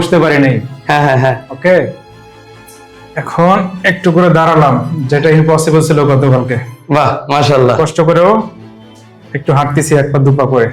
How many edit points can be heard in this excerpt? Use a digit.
0